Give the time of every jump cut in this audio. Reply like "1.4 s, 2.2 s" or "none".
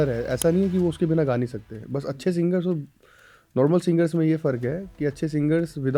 none